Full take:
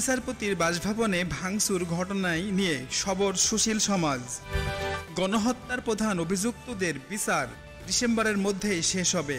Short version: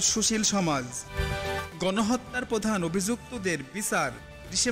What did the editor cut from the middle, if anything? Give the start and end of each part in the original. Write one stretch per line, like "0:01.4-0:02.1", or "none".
none